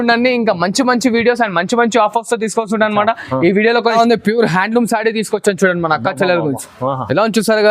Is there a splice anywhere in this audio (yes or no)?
yes